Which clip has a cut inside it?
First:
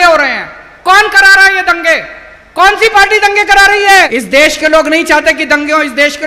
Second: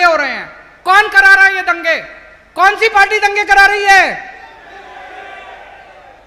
first; 1 cut; at 4.1 s

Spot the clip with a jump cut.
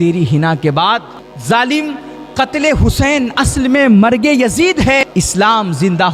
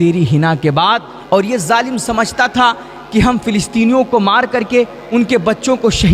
first; 2 cuts; at 1.1 s, 5.0 s

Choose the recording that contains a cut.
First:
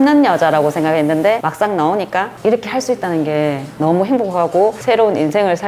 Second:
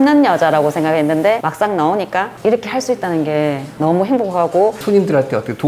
second; 1 cut; at 4.8 s

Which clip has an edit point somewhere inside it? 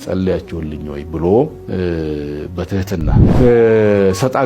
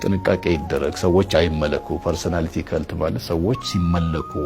first; 1 cut; at 3.3 s

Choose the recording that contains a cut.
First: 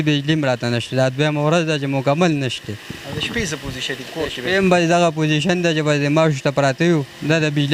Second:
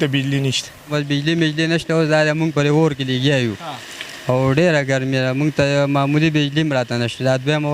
second; 1 cut; at 0.9 s

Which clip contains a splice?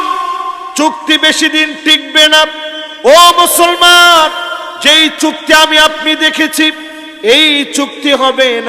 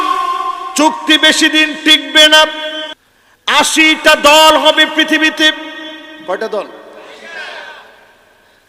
second; 1 cut; at 2.8 s

